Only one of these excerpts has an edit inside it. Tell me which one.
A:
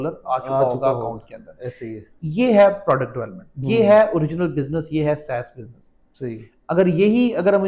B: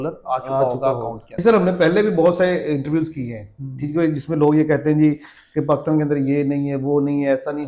B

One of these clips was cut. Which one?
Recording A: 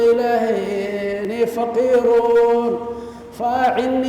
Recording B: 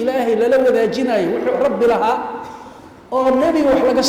A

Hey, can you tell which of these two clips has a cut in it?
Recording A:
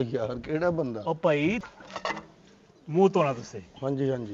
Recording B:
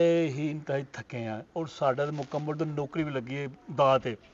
A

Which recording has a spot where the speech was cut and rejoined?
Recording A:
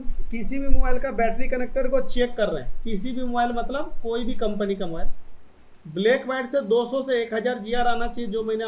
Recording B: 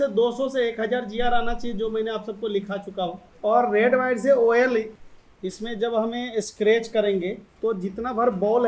B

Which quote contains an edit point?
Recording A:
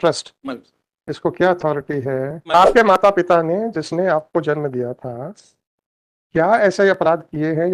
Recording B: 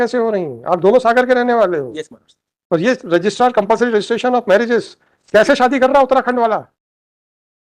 A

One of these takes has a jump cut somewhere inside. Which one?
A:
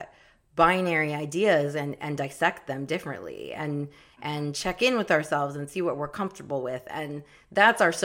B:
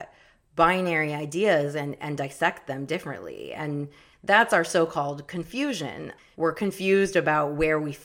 B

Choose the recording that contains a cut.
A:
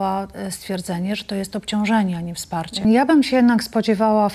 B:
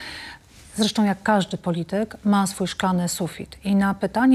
A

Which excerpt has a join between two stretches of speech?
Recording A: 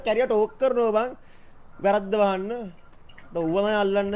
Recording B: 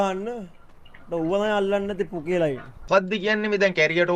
B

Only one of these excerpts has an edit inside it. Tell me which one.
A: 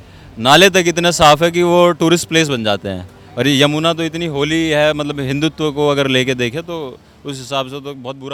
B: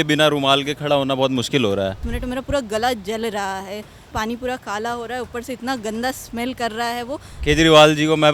B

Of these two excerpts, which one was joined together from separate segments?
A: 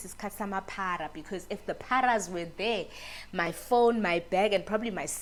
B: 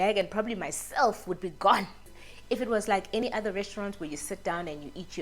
B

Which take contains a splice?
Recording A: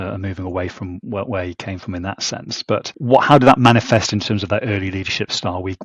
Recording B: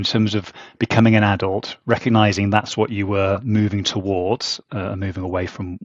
A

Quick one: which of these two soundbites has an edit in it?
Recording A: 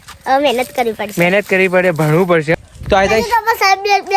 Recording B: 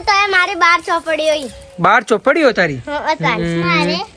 A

